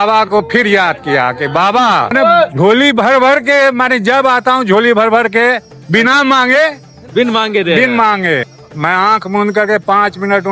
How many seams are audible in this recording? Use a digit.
2